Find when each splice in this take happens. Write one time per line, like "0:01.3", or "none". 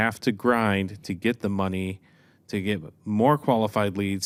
none